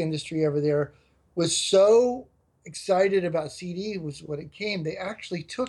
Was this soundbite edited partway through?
no; 0 cuts

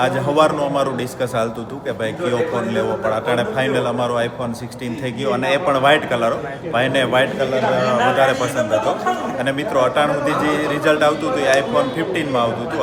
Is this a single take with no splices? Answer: yes; 0 cuts

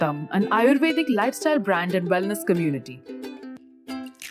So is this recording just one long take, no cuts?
no; 1 cut; at 2.8 s

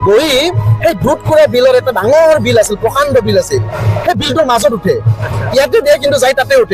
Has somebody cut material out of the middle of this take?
no; 0 cuts

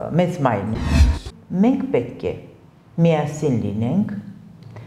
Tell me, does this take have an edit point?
yes; 1 cut; at 1.0 s

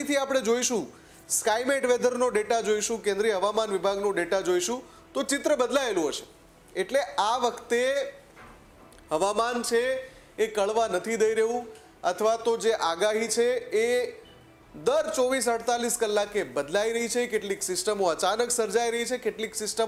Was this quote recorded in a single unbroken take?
yes; 0 cuts

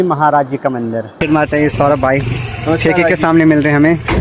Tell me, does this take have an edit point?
yes; 1 cut; at 1.2 s

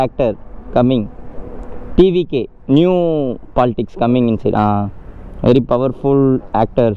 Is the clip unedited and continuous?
yes; 0 cuts

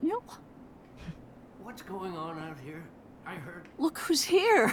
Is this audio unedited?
yes; 0 cuts

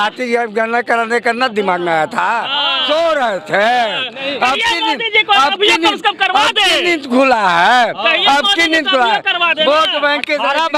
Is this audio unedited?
yes; 0 cuts

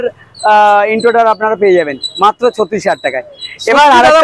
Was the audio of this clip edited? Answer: no; 0 cuts

